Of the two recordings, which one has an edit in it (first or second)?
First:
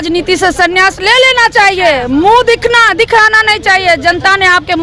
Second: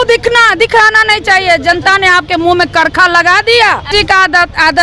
second